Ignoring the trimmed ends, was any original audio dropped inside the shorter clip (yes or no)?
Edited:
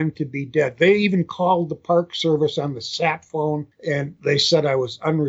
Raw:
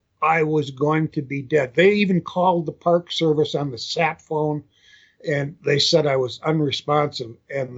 yes